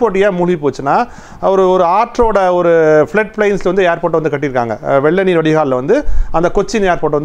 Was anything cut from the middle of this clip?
no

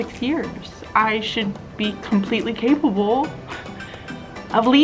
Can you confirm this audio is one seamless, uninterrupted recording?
yes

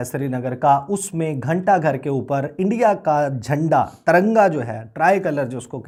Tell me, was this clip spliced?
no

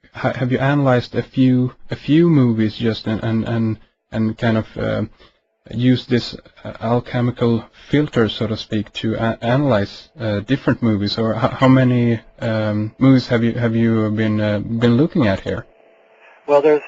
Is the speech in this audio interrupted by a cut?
no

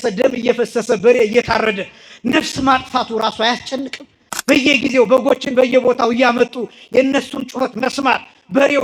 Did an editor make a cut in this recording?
no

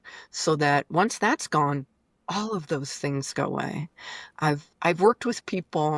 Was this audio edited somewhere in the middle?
no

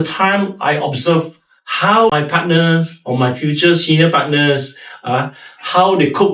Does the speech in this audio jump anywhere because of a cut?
no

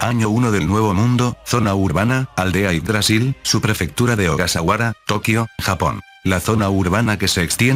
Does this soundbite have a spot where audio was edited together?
no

